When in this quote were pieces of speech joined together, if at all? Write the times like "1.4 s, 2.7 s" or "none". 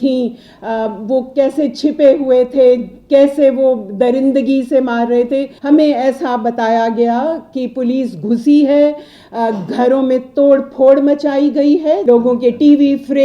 5.5 s, 12.0 s